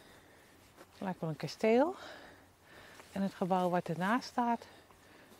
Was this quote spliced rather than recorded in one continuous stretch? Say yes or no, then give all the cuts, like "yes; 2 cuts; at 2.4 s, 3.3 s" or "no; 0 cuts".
no; 0 cuts